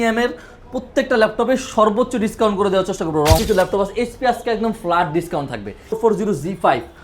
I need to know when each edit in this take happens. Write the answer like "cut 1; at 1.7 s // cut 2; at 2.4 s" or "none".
cut 1; at 3.4 s // cut 2; at 6.0 s